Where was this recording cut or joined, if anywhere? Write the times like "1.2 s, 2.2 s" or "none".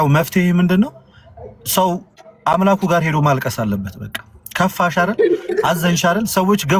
none